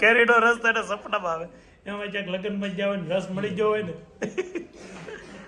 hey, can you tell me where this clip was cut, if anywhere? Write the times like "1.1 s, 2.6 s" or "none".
none